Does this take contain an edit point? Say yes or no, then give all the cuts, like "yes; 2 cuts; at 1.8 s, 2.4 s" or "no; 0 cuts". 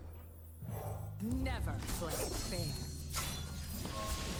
no; 0 cuts